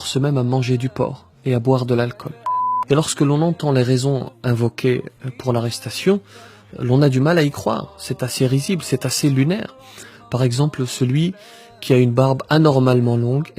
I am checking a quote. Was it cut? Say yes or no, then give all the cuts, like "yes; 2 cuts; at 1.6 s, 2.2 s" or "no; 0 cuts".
yes; 1 cut; at 2.4 s